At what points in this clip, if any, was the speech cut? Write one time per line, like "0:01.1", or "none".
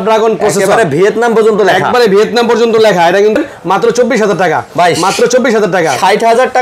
0:03.4